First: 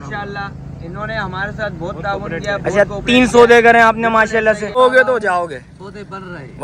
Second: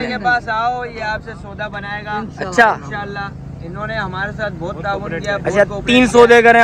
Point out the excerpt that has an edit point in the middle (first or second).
first